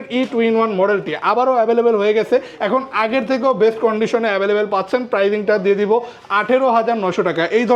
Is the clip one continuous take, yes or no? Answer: yes